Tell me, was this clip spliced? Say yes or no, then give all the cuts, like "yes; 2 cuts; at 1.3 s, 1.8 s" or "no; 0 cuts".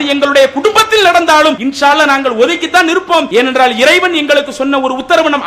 yes; 2 cuts; at 1.6 s, 3.3 s